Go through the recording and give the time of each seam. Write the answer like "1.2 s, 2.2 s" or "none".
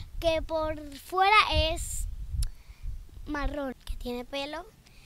3.8 s

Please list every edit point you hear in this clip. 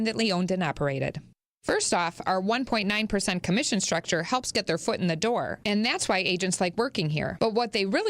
1.3 s

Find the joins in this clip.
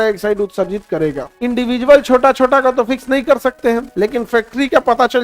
1.3 s, 3.9 s

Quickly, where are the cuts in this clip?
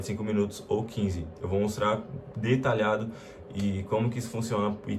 none

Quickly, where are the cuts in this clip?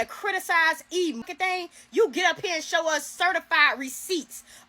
1.3 s

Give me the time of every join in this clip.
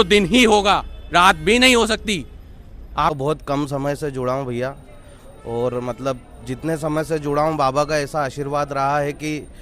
3.1 s

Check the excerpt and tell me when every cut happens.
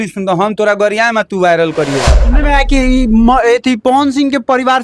2.3 s

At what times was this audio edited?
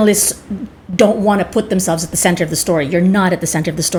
none

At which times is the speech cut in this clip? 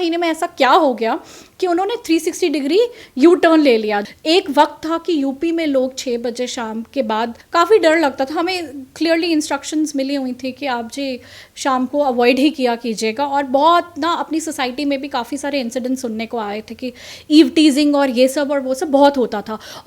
4.0 s, 7.4 s

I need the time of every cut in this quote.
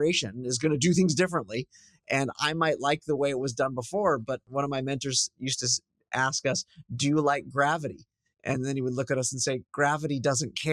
4.4 s

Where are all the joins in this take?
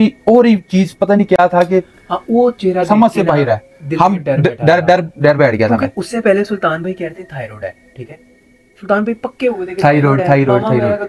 none

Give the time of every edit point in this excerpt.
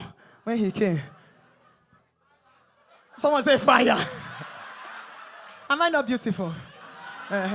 5.6 s

